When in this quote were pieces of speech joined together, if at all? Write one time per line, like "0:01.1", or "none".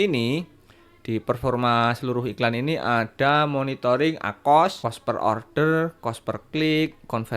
0:04.8